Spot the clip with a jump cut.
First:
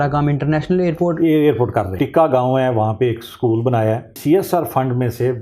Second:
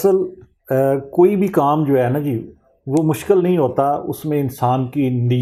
first; 2 cuts; at 1.9 s, 4.2 s

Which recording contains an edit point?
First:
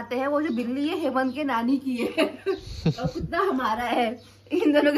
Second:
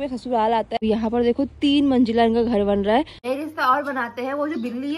second; 2 cuts; at 0.8 s, 3.2 s

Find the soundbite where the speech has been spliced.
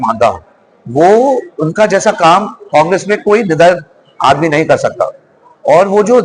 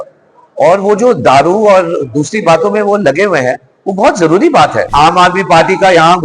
second; 1 cut; at 4.9 s

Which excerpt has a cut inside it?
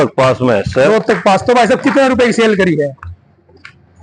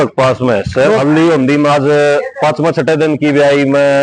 second; 1 cut; at 1.0 s

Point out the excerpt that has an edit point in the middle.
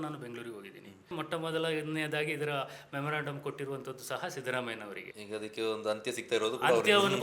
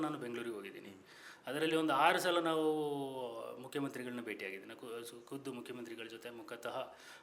first; 2 cuts; at 1.1 s, 5.1 s

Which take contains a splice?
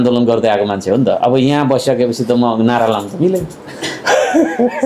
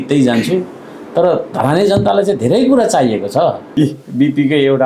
second; 1 cut; at 3.6 s

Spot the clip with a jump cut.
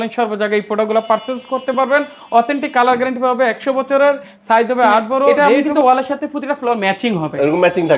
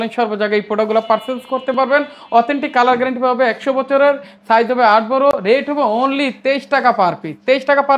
first; 1 cut; at 5.3 s

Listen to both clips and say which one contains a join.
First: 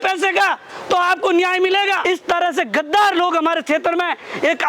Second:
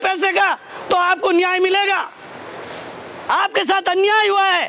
first; 1 cut; at 2.0 s

